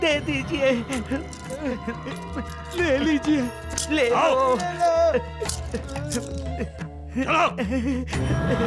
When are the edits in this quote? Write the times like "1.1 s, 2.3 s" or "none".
none